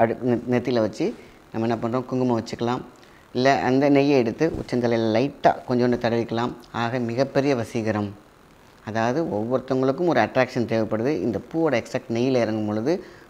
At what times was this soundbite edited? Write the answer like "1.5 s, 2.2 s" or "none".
none